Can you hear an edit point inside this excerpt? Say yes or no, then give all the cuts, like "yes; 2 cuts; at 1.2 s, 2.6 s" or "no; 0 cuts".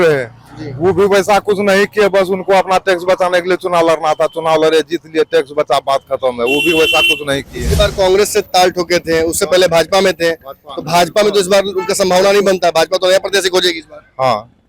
no; 0 cuts